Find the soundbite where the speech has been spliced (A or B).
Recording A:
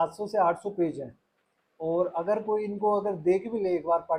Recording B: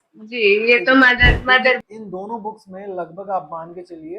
B